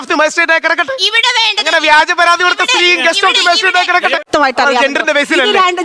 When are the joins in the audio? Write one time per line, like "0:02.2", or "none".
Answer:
0:04.3